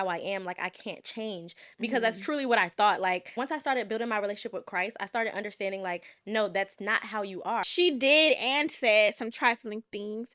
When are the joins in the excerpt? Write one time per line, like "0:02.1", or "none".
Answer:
0:03.3
0:07.7